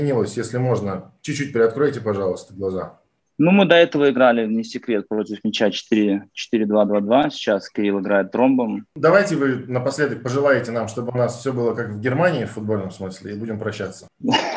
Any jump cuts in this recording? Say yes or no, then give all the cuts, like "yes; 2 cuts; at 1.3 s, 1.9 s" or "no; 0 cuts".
yes; 1 cut; at 8.9 s